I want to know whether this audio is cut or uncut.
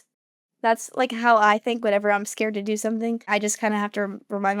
cut